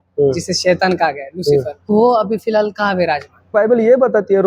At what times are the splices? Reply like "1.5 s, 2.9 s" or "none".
1.9 s, 3.5 s